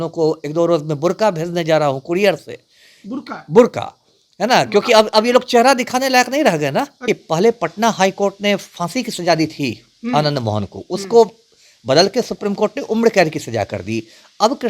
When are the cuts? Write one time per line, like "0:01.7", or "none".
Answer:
0:07.0